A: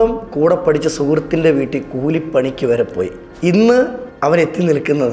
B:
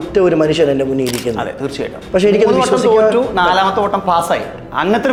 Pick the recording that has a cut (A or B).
A